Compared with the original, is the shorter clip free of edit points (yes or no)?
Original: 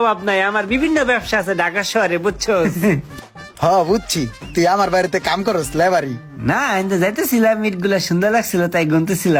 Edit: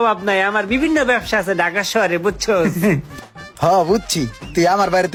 yes